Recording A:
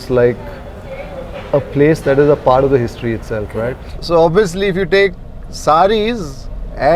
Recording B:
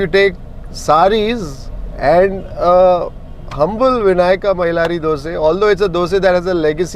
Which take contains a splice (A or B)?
A